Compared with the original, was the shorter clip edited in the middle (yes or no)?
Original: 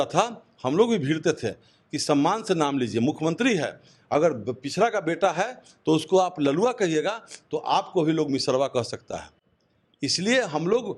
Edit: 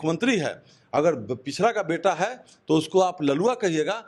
no